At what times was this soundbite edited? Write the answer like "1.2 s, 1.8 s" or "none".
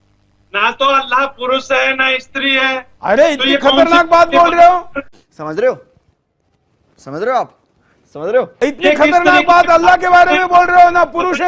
none